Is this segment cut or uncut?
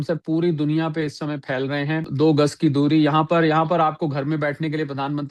cut